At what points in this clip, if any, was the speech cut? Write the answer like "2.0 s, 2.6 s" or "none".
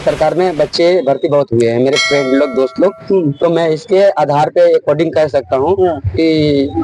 none